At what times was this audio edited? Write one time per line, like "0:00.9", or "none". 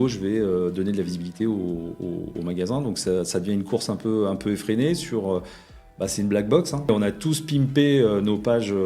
0:06.9